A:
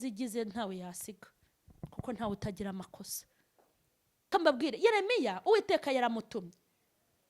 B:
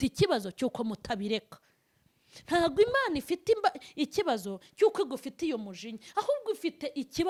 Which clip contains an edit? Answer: A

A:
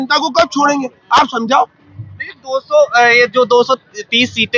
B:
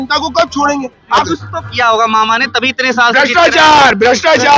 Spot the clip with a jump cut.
B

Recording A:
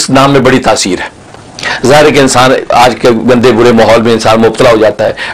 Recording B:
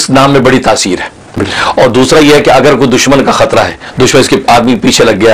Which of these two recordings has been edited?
B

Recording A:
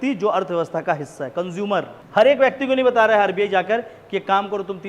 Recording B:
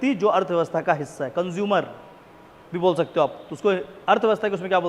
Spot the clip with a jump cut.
A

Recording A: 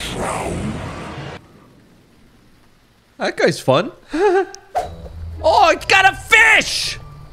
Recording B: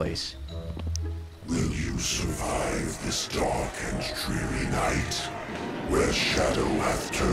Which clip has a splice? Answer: A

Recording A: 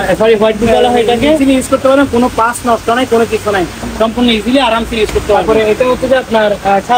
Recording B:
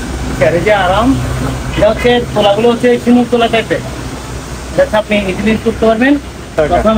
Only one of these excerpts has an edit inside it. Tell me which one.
A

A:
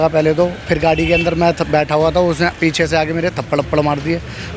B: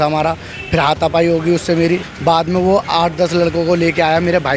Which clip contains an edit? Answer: B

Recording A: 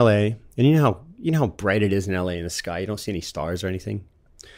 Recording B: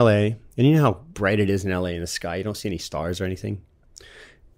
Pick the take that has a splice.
B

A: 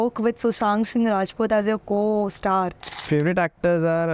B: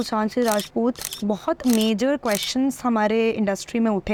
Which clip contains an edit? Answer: A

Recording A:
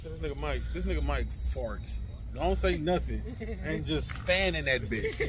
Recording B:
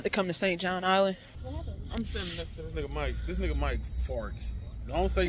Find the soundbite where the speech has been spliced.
B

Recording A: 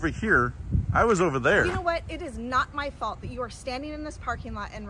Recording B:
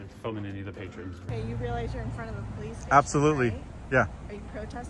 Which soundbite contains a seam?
B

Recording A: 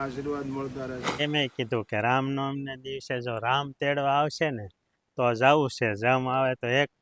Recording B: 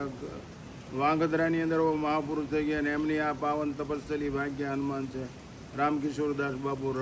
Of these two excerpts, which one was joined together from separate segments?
A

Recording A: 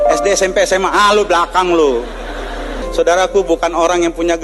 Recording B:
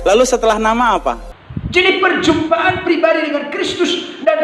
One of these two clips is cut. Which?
B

